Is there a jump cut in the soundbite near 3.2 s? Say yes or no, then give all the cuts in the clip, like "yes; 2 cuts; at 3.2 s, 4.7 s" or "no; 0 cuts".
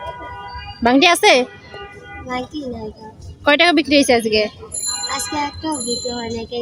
no; 0 cuts